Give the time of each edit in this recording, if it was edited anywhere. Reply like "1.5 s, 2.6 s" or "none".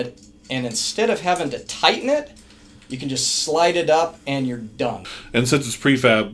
5.1 s